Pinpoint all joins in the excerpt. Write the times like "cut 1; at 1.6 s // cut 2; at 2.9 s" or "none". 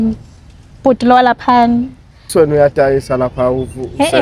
cut 1; at 2.3 s